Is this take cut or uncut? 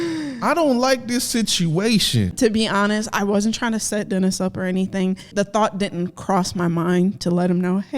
cut